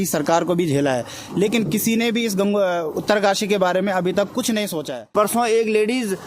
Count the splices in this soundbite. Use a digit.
1